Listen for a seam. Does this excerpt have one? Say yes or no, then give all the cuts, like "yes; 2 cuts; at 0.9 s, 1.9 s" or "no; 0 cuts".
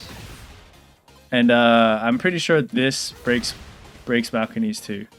no; 0 cuts